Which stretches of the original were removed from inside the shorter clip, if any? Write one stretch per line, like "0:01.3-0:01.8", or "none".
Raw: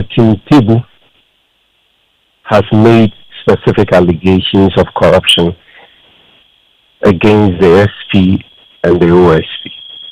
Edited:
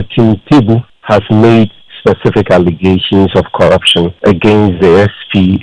0:00.9-0:02.3
0:05.6-0:06.9